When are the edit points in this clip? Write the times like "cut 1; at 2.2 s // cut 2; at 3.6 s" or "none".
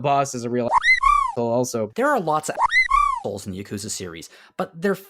cut 1; at 1.9 s

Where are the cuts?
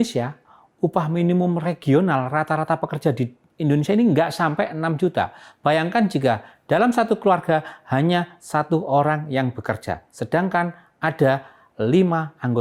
none

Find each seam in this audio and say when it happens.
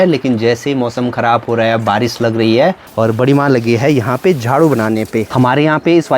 cut 1; at 2.9 s // cut 2; at 5.3 s

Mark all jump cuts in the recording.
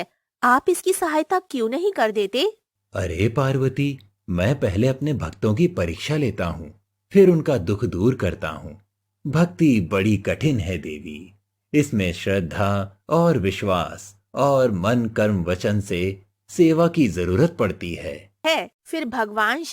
cut 1; at 18.3 s

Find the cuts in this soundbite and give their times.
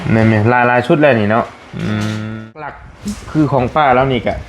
cut 1; at 2.6 s

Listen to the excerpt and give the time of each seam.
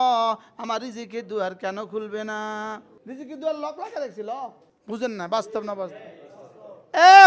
cut 1; at 2.9 s // cut 2; at 4.7 s

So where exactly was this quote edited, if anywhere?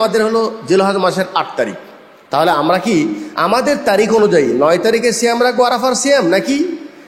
none

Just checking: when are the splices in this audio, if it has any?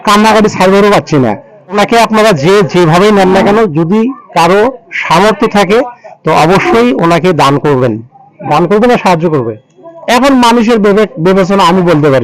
cut 1; at 1.5 s

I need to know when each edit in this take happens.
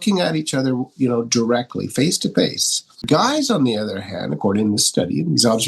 cut 1; at 3.1 s

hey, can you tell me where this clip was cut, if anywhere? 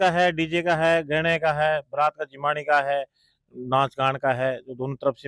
none

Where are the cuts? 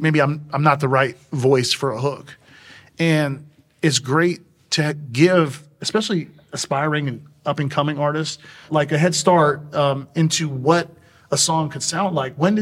cut 1; at 8.6 s

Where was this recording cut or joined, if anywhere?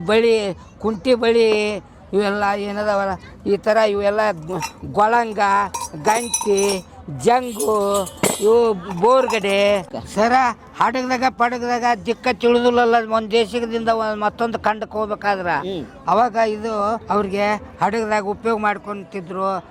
cut 1; at 17.0 s

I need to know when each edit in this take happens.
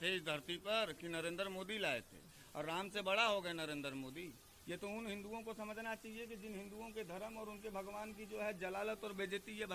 none

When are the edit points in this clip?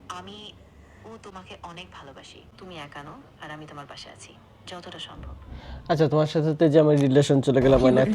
cut 1; at 2.4 s

